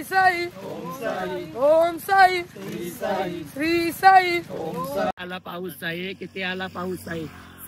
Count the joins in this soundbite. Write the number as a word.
one